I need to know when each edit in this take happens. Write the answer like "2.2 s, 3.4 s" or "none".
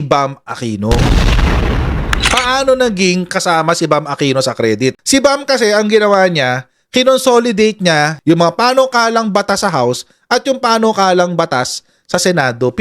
5.0 s, 8.1 s